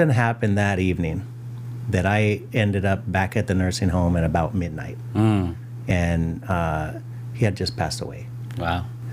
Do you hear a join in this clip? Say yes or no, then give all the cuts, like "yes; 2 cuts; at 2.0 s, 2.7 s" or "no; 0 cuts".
no; 0 cuts